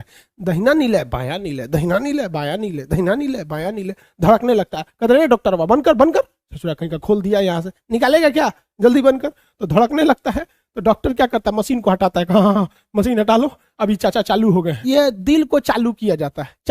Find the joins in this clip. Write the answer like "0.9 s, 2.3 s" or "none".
14.8 s